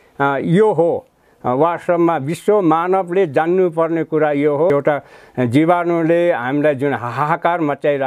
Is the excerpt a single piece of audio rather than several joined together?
no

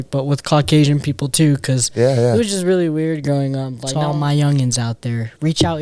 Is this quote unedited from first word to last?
no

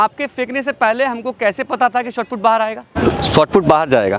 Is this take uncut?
no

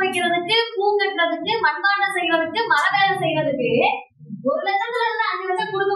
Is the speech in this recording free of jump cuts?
yes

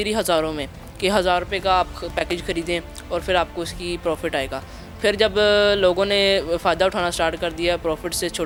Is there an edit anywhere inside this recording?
no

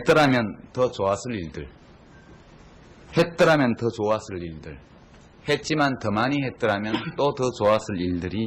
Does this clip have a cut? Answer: no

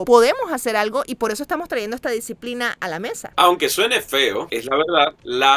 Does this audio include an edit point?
yes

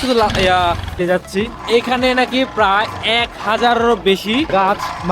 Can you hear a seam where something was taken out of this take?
yes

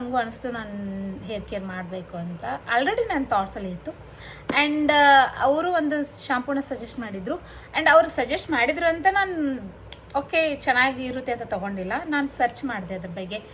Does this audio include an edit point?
no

